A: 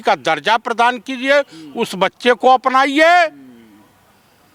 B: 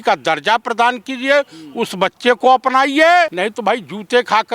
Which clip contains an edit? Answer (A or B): B